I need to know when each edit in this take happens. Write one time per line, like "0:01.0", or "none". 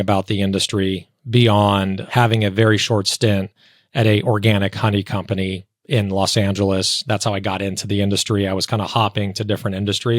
0:02.0